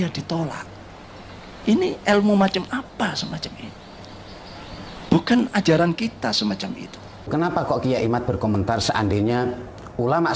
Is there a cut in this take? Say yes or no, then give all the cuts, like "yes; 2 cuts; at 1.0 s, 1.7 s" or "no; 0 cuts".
yes; 1 cut; at 7.3 s